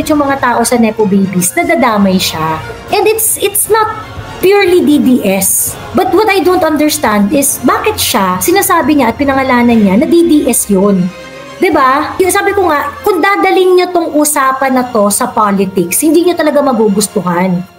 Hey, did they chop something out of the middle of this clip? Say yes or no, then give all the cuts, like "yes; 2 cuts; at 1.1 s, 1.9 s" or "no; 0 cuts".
no; 0 cuts